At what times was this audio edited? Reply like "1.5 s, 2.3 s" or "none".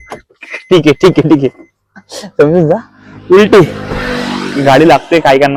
none